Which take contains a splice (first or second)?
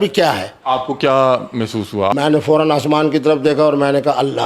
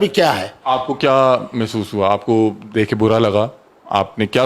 first